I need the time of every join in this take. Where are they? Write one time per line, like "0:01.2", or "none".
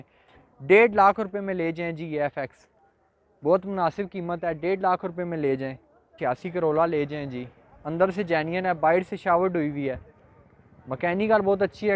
0:06.1